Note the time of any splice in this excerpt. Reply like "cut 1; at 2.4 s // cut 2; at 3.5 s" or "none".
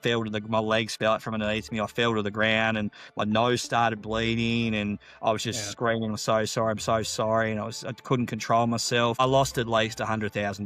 cut 1; at 9.2 s